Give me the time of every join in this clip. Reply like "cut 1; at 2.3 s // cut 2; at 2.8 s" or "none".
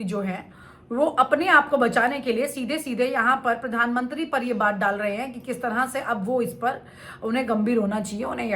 none

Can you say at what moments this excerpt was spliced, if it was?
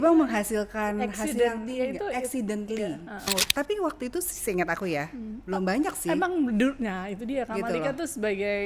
cut 1; at 3.3 s

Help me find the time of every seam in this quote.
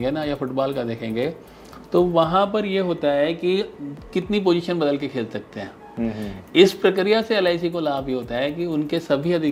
none

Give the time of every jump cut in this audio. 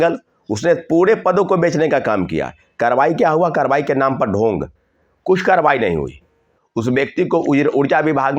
none

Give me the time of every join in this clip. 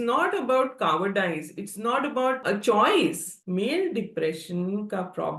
cut 1; at 2.4 s // cut 2; at 3.3 s

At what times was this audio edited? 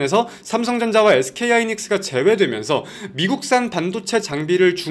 none

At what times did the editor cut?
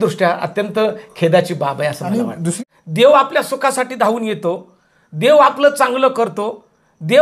cut 1; at 2.5 s

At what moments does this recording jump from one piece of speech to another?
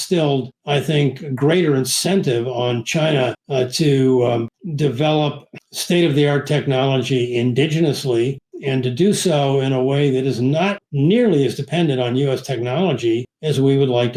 none

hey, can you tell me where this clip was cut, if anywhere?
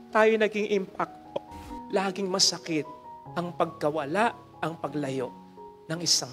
cut 1; at 1.6 s

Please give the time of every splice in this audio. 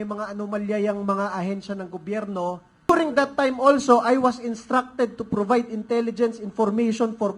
cut 1; at 2.9 s

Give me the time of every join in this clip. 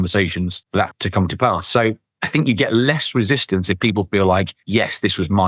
none

